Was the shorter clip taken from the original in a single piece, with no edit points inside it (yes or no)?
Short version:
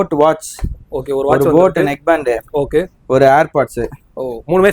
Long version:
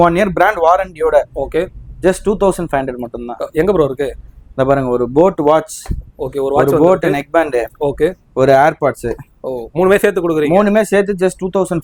yes